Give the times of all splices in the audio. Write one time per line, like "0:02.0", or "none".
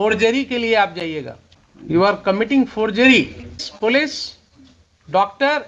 0:02.0
0:03.7

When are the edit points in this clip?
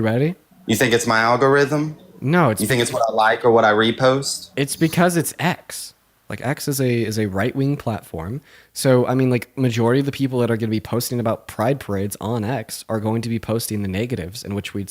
0:06.1

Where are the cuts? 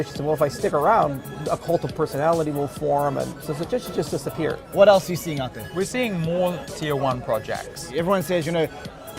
0:03.4
0:04.6
0:05.6
0:07.8

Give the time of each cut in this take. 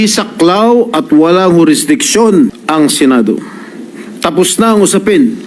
0:02.6

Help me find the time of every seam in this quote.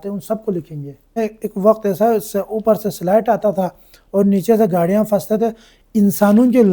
0:01.2

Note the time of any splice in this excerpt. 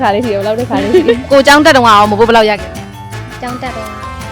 0:01.3

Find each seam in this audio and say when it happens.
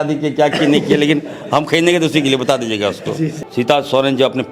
0:03.4

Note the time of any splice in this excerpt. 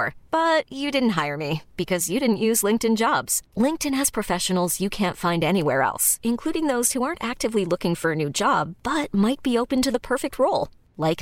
none

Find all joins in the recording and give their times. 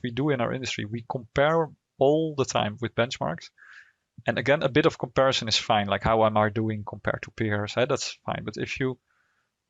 none

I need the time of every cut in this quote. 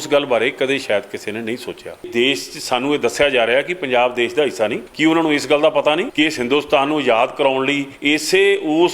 0:02.1
0:04.8
0:06.1
0:07.9

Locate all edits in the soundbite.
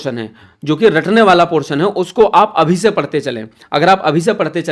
none

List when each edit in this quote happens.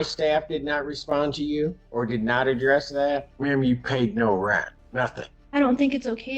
0:01.8
0:03.3
0:05.1

